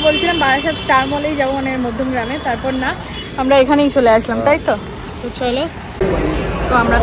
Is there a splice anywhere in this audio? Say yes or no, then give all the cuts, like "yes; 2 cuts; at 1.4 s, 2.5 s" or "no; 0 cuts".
yes; 1 cut; at 5.8 s